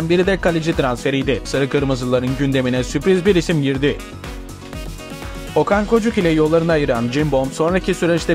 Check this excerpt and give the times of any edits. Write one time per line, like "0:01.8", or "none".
0:01.4